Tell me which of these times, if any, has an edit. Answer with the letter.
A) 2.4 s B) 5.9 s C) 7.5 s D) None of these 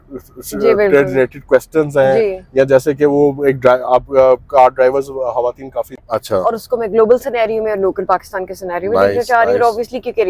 B